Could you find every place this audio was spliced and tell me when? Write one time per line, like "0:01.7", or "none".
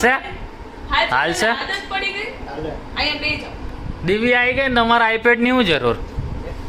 none